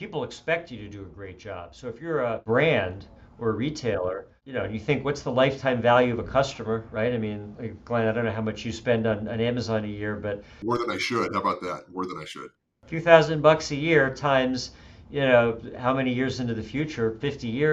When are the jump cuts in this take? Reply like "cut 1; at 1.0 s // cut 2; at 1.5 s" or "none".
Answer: cut 1; at 2.4 s // cut 2; at 4.4 s // cut 3; at 10.5 s // cut 4; at 12.4 s

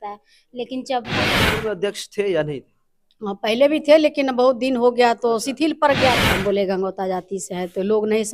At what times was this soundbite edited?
cut 1; at 1.2 s // cut 2; at 6.2 s

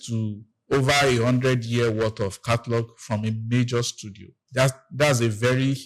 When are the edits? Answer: none

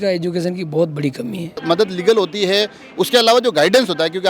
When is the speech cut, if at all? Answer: cut 1; at 1.6 s

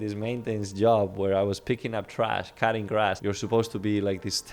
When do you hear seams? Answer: cut 1; at 3.2 s

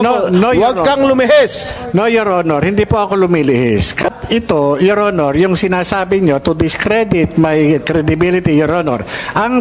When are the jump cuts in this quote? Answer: cut 1; at 4.0 s

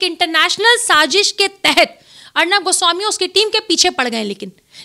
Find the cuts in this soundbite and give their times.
none

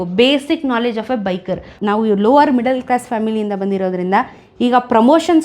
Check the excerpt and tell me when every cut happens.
cut 1; at 1.7 s

